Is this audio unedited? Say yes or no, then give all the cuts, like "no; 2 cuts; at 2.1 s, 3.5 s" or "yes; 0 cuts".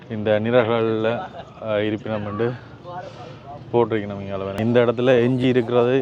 no; 1 cut; at 4.5 s